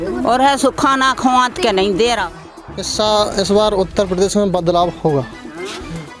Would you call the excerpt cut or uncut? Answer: cut